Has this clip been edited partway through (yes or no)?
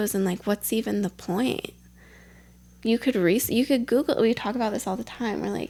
no